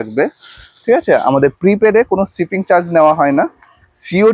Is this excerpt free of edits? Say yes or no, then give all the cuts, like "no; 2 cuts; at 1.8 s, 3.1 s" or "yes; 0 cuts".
yes; 0 cuts